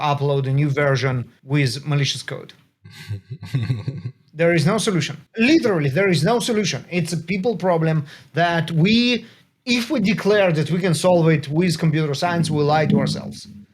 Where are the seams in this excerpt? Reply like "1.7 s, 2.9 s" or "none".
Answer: 1.3 s, 5.2 s